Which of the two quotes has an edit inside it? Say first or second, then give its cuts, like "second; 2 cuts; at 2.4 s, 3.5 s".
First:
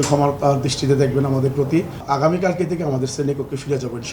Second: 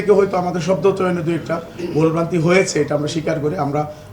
first; 1 cut; at 2.0 s